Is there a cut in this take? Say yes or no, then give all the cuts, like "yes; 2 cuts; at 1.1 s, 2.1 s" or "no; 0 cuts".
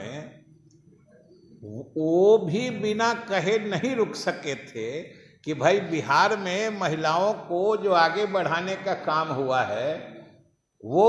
no; 0 cuts